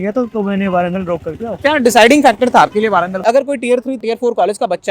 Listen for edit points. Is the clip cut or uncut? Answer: cut